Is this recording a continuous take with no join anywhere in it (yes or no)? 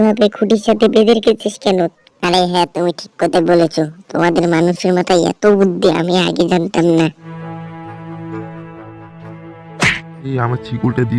no